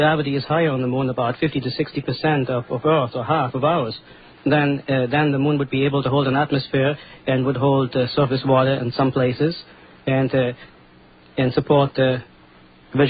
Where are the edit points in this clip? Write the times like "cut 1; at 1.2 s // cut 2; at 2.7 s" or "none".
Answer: cut 1; at 9.1 s